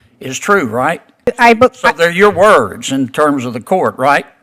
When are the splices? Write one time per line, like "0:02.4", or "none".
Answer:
0:01.3

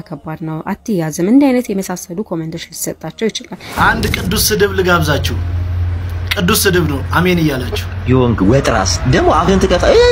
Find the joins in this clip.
0:03.7

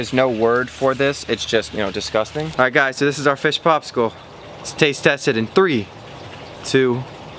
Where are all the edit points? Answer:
0:02.5

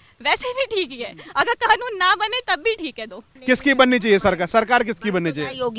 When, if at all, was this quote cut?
0:03.3

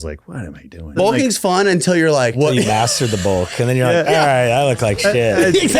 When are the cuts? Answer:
0:01.0
0:02.3

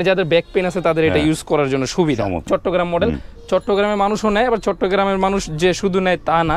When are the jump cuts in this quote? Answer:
0:02.4

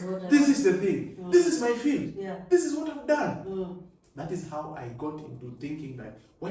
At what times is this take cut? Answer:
none

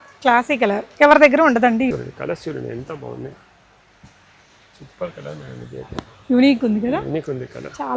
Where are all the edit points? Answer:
0:01.9

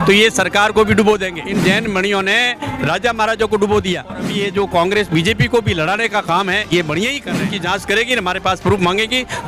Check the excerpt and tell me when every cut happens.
0:01.4
0:04.3
0:07.5

